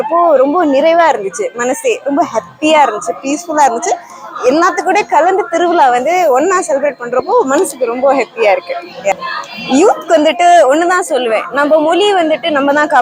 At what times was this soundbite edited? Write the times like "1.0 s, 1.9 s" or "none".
none